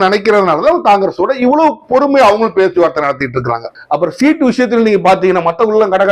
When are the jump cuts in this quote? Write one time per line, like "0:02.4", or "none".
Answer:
0:03.7